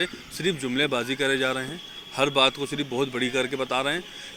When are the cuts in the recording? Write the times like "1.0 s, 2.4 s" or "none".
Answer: none